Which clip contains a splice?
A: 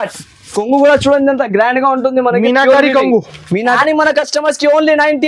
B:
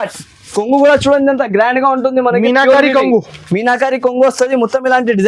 A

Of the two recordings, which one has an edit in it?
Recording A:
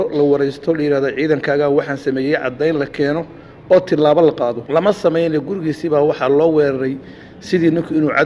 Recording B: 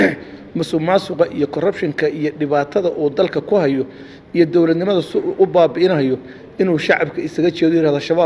A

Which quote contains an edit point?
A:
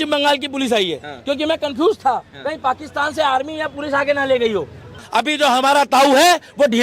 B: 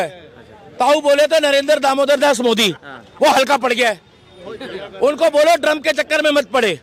A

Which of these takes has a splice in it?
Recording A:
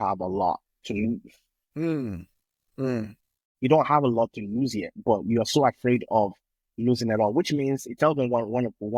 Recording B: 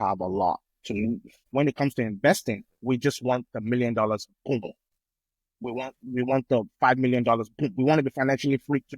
B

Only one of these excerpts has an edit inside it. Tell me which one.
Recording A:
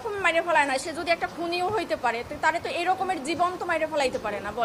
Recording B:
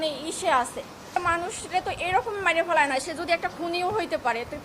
B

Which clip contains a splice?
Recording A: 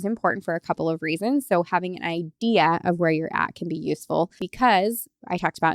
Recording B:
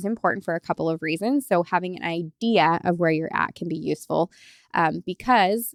A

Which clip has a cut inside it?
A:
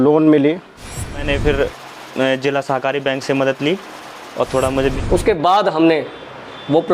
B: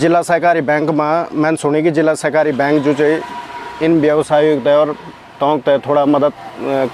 A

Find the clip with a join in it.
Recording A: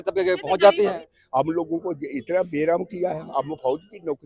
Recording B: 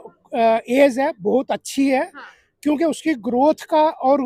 A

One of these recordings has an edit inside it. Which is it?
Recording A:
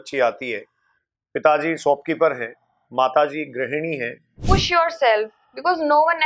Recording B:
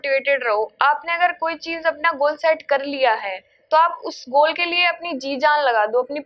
A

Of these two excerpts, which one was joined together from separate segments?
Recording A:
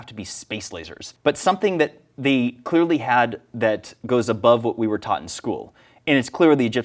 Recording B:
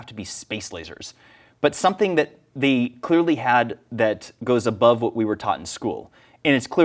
A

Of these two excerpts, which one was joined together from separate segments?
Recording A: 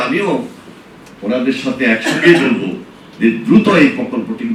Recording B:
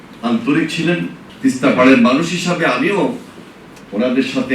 B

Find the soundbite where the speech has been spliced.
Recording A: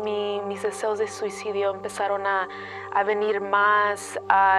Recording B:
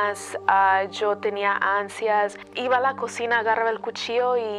B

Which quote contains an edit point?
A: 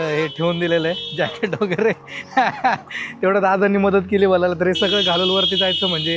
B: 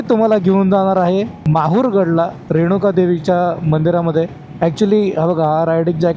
B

